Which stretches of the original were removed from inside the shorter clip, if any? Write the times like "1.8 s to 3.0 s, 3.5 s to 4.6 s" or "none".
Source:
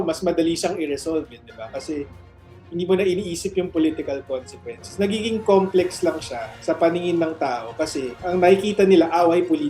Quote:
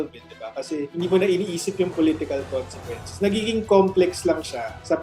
2.1 s to 2.7 s